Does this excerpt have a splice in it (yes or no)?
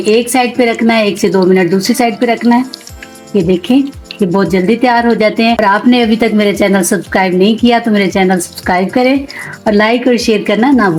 no